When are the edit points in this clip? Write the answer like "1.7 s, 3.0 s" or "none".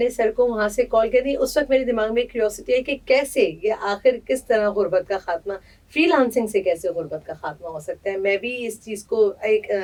none